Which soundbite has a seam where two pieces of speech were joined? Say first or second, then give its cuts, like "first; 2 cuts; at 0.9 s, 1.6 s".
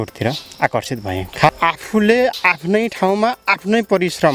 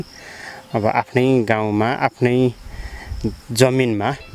first; 1 cut; at 1.5 s